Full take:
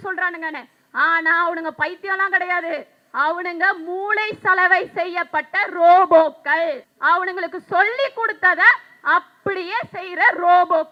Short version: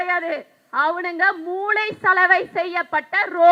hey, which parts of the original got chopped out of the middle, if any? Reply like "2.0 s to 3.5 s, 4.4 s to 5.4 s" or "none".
none